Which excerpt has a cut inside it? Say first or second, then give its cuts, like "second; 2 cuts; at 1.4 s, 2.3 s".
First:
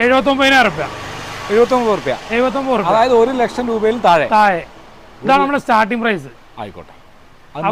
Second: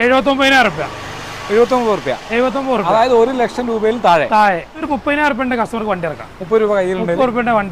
second; 1 cut; at 4.7 s